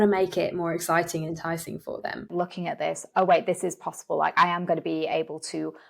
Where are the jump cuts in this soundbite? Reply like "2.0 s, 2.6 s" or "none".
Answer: 2.3 s